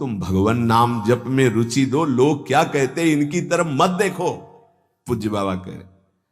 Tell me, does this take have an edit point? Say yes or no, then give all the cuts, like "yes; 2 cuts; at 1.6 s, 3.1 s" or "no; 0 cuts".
no; 0 cuts